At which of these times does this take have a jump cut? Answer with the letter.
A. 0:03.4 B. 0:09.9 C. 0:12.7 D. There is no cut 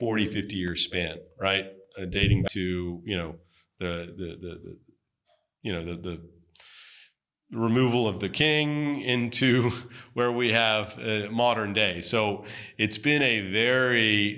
D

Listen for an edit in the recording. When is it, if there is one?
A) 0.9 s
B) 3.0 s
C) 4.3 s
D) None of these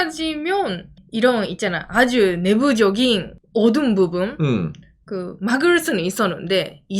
D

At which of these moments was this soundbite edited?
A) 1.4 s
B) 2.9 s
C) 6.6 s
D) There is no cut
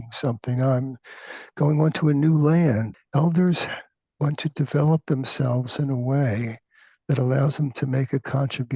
B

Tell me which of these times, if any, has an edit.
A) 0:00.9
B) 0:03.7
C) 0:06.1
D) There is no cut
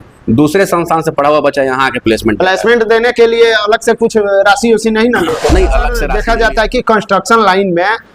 C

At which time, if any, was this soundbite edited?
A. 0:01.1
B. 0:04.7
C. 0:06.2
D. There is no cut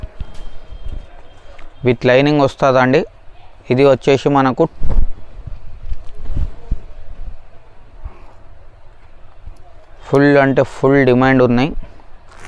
B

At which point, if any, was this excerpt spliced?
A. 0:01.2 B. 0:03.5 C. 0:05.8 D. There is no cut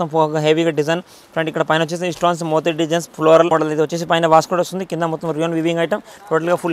B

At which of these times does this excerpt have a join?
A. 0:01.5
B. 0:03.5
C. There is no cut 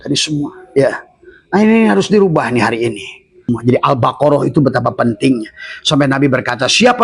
B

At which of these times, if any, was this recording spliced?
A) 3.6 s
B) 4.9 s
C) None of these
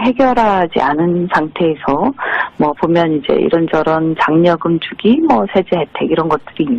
B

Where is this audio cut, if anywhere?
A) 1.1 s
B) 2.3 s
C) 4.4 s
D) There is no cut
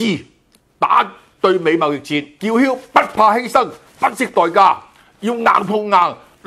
B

